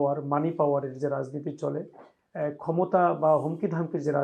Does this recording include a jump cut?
no; 0 cuts

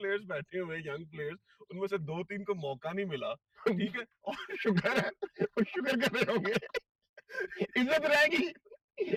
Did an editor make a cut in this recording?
no; 0 cuts

